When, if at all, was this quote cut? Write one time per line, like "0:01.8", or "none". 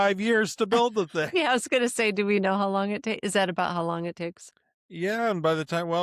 none